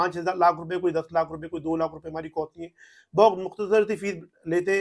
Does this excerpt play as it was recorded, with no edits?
yes; 0 cuts

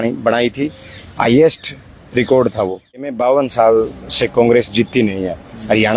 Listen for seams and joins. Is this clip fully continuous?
no; 1 cut; at 3.1 s

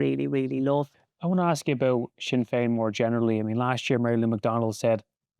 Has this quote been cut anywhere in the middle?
yes; 1 cut; at 1.0 s

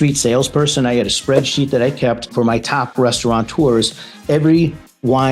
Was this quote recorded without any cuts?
no; 1 cut; at 2.8 s

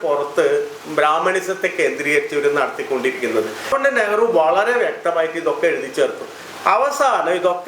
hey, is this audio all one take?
no; 1 cut; at 3.7 s

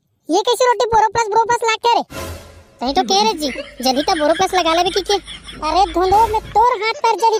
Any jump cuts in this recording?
no; 0 cuts

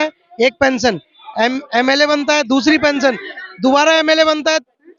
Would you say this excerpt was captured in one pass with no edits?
yes; 0 cuts

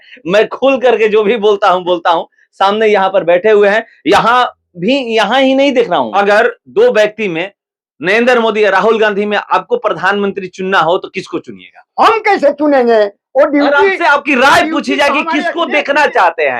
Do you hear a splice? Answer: yes; 1 cut; at 6.1 s

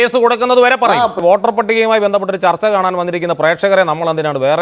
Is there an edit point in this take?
yes; 1 cut; at 1.2 s

